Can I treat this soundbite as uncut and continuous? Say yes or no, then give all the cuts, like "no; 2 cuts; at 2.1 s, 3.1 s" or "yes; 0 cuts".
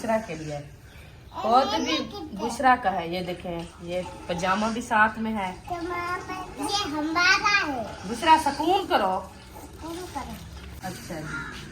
no; 1 cut; at 10.7 s